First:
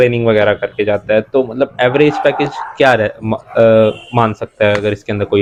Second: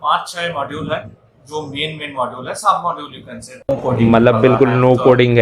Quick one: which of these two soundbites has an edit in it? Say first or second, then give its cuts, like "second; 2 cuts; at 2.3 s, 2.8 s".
second; 1 cut; at 3.6 s